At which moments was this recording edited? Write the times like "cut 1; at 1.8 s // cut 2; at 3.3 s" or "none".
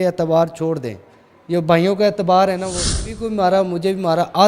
cut 1; at 3.1 s